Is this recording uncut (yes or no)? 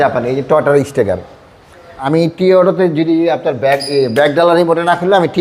no